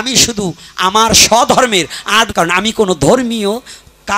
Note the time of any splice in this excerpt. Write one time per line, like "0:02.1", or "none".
0:02.3